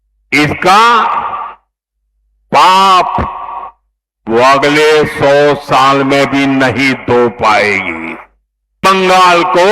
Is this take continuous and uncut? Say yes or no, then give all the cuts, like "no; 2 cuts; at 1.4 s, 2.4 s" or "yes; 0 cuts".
no; 1 cut; at 8.8 s